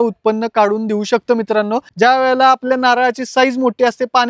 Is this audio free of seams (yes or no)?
no